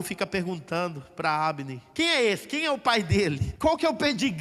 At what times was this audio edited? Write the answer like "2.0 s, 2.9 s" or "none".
1.8 s, 3.5 s